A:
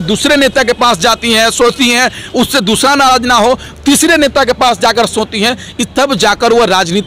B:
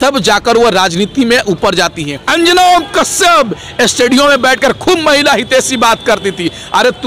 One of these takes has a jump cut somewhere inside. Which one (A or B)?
B